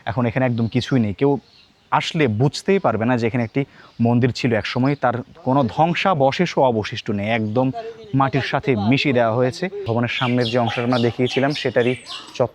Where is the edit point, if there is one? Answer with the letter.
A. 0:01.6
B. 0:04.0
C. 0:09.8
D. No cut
C